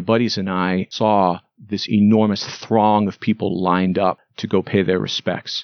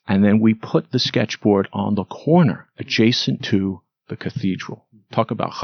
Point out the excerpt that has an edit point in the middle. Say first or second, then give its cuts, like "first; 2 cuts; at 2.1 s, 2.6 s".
first; 2 cuts; at 0.9 s, 4.3 s